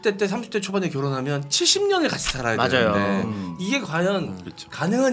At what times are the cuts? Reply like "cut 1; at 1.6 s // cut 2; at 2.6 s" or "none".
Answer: none